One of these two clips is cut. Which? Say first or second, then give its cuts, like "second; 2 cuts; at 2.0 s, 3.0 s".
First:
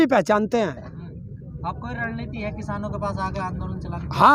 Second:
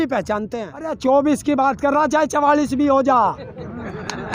second; 1 cut; at 1.0 s